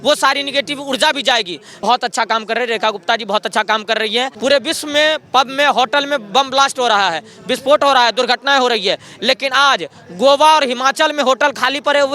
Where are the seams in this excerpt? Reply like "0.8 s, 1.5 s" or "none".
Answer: 1.6 s, 4.3 s